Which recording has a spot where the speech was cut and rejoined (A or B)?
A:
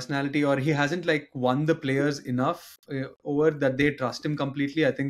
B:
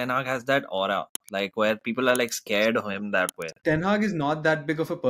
B